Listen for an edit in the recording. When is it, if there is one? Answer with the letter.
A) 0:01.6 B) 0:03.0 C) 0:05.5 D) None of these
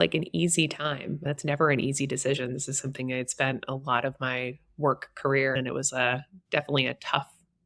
C